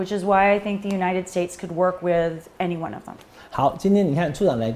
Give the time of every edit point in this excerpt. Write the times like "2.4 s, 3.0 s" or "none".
none